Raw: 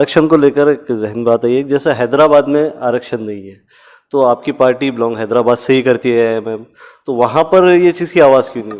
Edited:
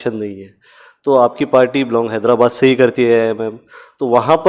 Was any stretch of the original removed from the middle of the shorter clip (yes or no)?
no